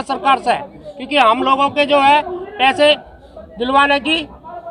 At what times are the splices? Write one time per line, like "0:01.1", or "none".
none